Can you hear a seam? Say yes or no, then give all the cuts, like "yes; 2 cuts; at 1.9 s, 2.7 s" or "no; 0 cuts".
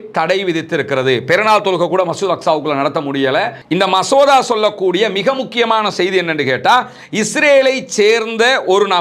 yes; 1 cut; at 3.6 s